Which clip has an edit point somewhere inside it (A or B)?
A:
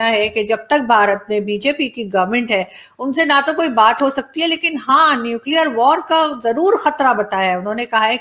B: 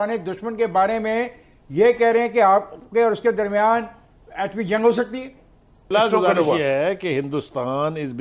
B